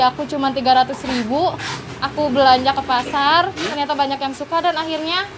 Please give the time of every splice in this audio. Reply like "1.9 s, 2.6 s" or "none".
3.7 s